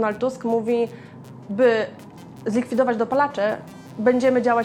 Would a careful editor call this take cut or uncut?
uncut